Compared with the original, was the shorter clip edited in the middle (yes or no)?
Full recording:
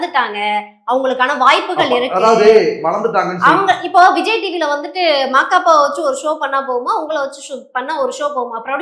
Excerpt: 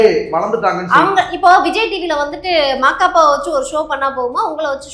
no